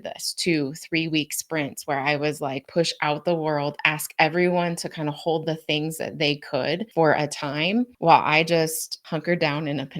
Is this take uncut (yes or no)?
no